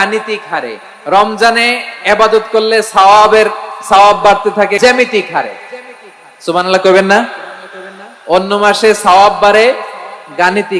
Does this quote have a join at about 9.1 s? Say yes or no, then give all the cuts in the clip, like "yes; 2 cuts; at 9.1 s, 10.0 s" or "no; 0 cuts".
no; 1 cut; at 4.8 s